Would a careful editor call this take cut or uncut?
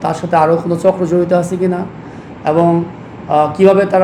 uncut